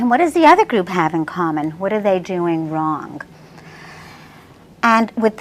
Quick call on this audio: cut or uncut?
cut